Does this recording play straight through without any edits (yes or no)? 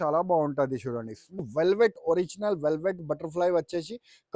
no